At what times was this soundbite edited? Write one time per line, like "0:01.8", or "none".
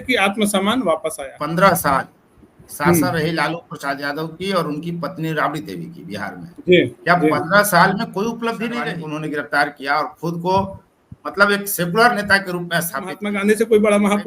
0:01.2
0:08.8
0:13.2